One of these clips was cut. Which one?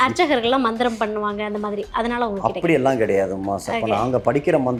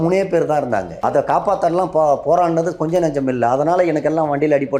second; 1 cut; at 0.9 s

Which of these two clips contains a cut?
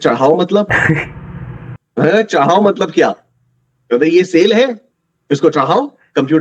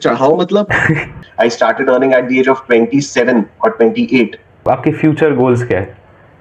second; 2 cuts; at 1.2 s, 4.6 s

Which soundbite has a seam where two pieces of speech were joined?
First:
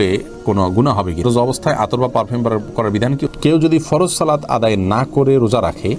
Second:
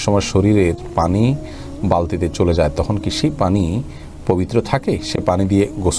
first; 2 cuts; at 1.2 s, 3.3 s

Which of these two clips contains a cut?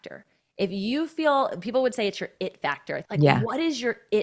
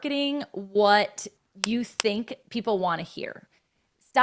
first; 1 cut; at 3.0 s

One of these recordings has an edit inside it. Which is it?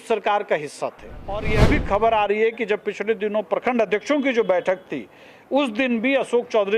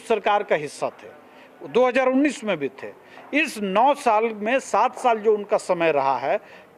first; 1 cut; at 1.5 s

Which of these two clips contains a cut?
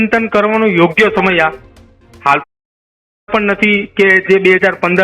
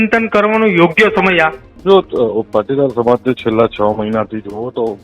second; 1 cut; at 1.7 s

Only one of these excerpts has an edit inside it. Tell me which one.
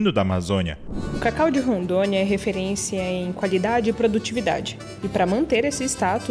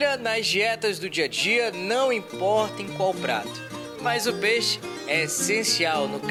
first; 1 cut; at 0.9 s

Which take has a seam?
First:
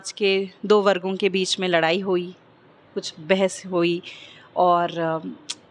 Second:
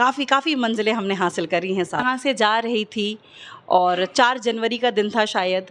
second; 1 cut; at 2.0 s

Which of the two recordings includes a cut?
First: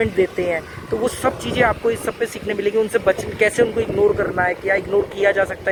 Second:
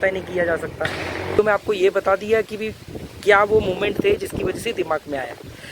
second; 1 cut; at 1.4 s

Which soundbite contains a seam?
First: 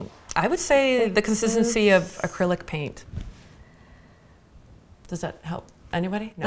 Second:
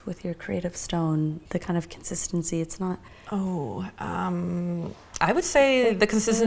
second; 1 cut; at 1.4 s

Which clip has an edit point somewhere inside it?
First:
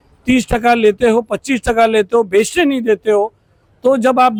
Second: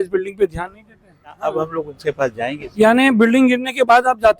second; 1 cut; at 1.4 s

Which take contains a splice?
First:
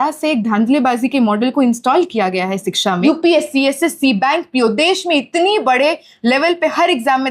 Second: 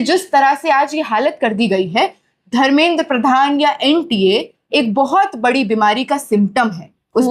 first; 1 cut; at 3.0 s

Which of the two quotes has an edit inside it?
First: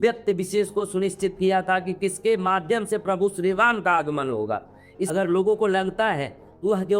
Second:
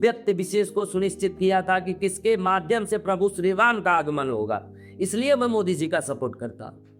first; 1 cut; at 5.1 s

